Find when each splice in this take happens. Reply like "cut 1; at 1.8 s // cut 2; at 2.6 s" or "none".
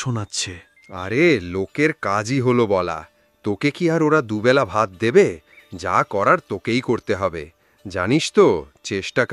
none